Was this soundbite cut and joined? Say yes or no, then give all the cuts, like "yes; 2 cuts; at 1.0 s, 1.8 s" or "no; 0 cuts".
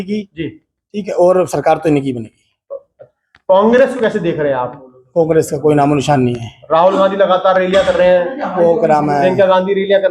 no; 0 cuts